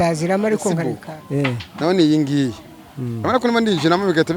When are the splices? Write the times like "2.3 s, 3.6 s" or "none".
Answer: 1.0 s